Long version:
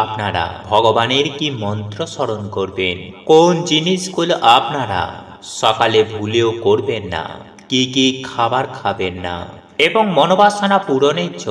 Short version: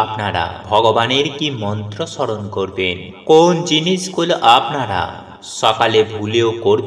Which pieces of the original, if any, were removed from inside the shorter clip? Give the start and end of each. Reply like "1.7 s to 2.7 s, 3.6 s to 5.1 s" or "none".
none